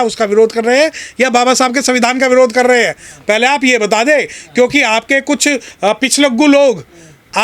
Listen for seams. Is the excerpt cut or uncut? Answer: uncut